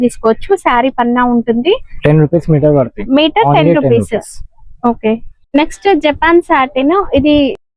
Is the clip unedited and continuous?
no; 2 cuts; at 1.9 s, 5.3 s

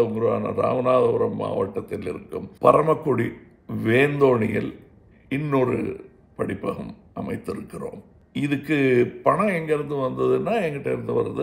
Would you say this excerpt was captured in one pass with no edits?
no; 2 cuts; at 2.5 s, 8.1 s

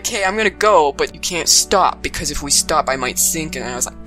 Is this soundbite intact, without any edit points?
no; 1 cut; at 1.1 s

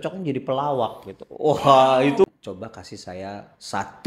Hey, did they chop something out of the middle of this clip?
yes; 1 cut; at 2.3 s

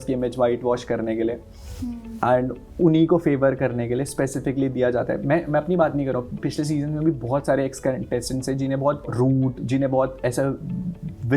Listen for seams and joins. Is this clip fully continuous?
yes; 0 cuts

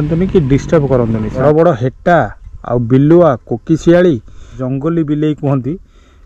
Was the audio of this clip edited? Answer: yes; 2 cuts; at 1.3 s, 4.6 s

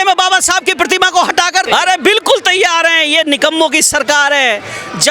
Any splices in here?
yes; 1 cut; at 1.7 s

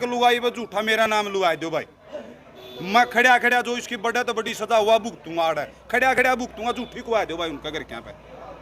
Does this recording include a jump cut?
no; 0 cuts

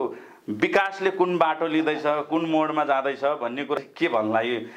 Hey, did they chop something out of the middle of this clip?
yes; 1 cut; at 3.8 s

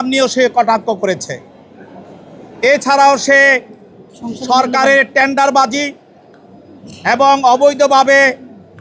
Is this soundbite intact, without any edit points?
yes; 0 cuts

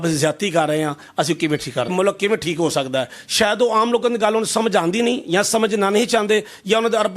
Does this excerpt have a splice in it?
yes; 1 cut; at 1.9 s

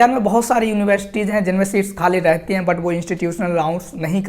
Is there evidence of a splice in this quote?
no; 0 cuts

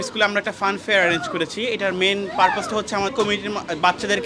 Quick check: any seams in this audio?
yes; 1 cut; at 3.1 s

